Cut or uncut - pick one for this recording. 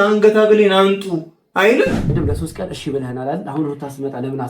cut